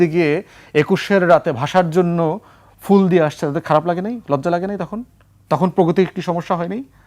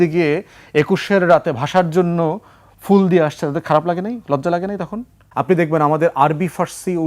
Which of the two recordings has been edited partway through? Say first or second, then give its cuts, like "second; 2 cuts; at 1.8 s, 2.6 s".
second; 1 cut; at 5.2 s